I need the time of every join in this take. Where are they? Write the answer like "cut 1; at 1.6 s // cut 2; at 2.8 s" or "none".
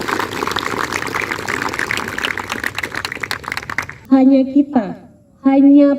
cut 1; at 4.0 s